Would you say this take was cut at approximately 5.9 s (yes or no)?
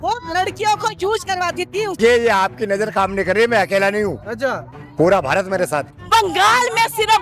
yes